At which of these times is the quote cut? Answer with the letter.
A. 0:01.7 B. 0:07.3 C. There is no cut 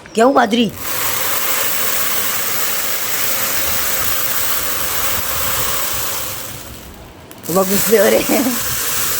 C